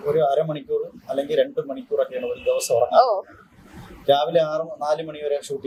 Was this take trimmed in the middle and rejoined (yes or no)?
no